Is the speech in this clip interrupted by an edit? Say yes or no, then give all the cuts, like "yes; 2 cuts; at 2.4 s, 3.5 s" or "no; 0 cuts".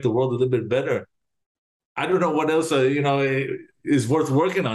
no; 0 cuts